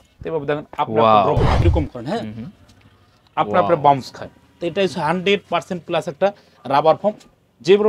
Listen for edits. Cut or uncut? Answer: cut